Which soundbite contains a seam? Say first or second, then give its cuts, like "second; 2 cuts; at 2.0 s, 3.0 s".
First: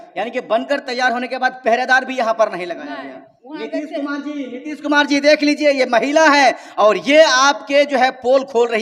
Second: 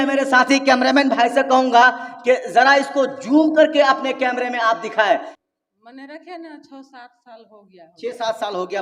second; 1 cut; at 5.3 s